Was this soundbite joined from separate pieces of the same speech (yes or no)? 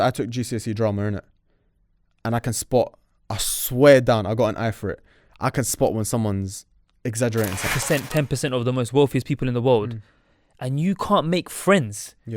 yes